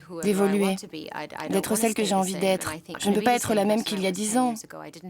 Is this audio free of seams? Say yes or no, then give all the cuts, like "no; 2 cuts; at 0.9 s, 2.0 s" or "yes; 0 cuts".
no; 1 cut; at 2.9 s